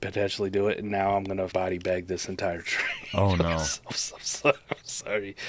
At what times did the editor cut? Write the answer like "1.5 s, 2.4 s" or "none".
1.5 s